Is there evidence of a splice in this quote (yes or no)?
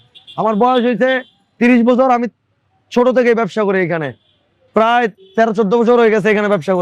no